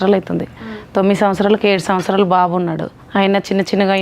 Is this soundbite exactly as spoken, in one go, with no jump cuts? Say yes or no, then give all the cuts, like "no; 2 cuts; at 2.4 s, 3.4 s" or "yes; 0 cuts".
no; 1 cut; at 2.9 s